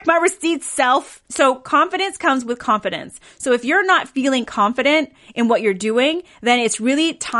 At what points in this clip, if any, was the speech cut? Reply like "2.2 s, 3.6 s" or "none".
1.2 s